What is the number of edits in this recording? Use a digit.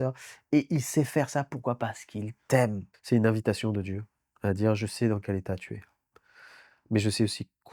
1